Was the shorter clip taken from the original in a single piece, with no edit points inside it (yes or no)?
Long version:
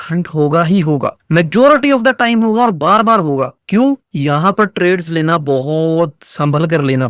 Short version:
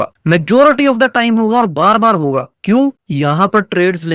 yes